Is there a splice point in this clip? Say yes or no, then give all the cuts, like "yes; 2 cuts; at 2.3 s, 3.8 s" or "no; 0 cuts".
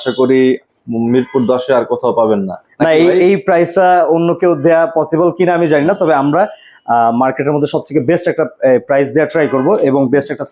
no; 0 cuts